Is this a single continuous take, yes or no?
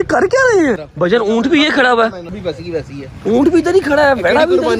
no